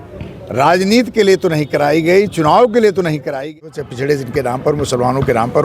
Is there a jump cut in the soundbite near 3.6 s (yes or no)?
yes